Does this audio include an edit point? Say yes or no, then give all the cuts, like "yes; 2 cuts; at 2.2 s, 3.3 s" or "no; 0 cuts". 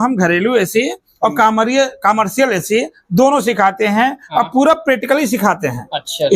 no; 0 cuts